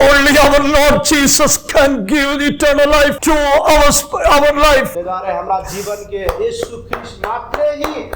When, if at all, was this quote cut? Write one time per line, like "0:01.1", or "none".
0:03.2
0:04.9